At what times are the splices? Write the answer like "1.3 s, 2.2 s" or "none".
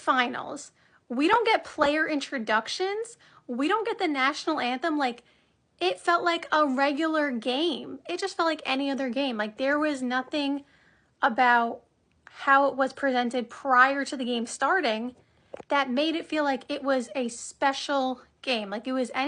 none